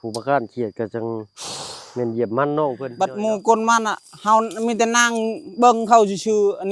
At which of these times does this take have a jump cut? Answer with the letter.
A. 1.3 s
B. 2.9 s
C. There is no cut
B